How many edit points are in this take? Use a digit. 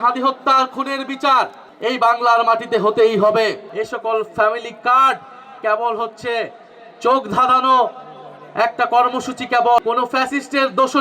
3